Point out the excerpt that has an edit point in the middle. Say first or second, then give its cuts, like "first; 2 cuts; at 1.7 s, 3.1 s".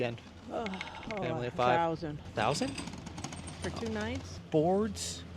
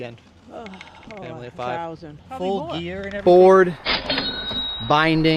second; 2 cuts; at 2.1 s, 3.1 s